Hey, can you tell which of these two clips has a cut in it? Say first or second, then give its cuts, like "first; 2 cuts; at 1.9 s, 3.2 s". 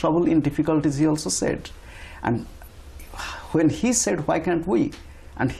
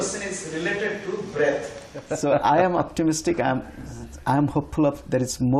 second; 1 cut; at 2.1 s